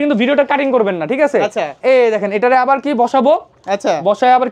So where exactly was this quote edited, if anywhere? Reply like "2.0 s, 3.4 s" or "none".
none